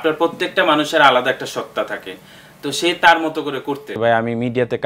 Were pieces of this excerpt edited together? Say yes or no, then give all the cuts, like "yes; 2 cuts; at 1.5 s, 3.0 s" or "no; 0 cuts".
yes; 1 cut; at 3.9 s